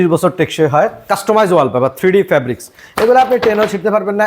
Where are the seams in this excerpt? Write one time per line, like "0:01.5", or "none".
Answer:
0:01.1